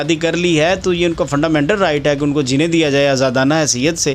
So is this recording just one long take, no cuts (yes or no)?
yes